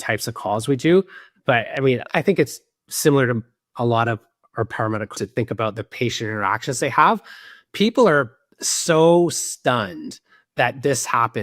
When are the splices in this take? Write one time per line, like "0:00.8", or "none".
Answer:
0:02.1
0:05.1